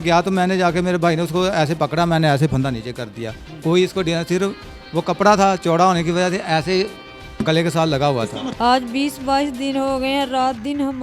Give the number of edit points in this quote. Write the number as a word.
one